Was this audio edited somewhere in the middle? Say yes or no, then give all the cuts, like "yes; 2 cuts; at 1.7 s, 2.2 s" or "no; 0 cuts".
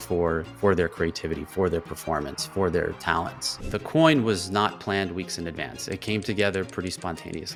no; 0 cuts